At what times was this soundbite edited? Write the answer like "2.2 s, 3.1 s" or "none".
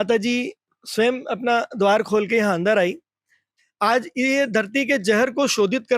3.4 s